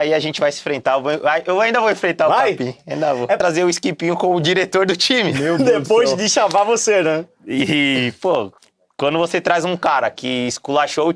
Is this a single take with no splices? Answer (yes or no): no